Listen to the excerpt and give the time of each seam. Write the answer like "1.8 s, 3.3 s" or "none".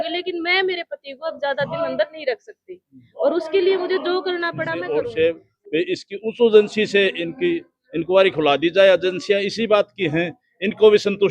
4.7 s